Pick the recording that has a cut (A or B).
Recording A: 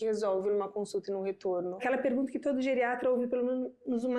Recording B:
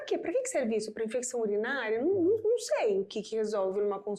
A